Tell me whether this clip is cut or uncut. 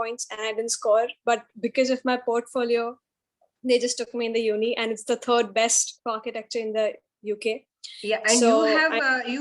uncut